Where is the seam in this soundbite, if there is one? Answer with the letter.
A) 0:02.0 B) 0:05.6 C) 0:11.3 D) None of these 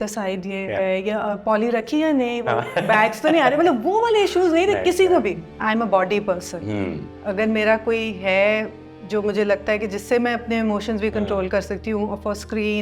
B